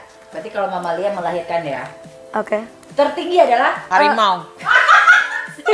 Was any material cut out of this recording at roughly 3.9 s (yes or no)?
yes